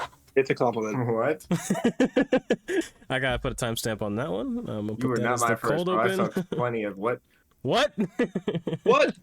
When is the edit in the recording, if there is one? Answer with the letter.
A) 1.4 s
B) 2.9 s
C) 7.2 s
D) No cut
B